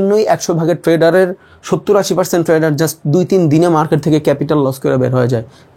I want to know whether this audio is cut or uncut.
uncut